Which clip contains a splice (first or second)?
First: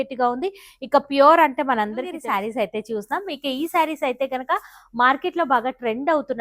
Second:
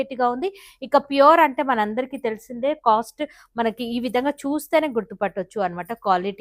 first